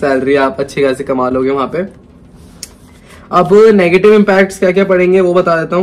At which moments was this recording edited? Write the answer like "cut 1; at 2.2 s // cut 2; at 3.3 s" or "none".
none